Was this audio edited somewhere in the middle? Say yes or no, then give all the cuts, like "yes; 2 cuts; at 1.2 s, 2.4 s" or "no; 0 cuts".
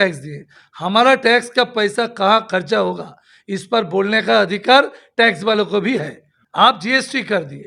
no; 0 cuts